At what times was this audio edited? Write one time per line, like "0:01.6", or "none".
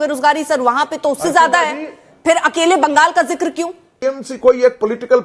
0:03.9